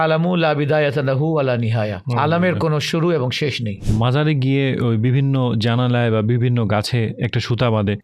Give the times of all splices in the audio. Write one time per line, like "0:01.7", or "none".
0:03.8